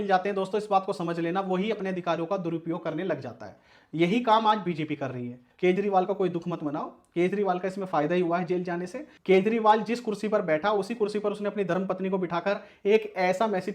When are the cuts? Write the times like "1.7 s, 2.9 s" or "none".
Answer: 5.5 s, 9.0 s